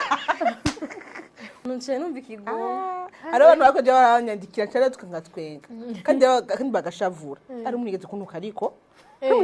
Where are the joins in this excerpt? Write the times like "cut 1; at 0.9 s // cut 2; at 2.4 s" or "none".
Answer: cut 1; at 1.5 s